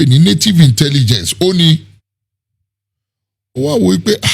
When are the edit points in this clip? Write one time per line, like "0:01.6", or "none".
none